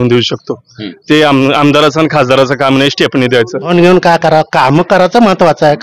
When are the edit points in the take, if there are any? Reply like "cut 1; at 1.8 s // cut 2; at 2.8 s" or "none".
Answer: cut 1; at 3.7 s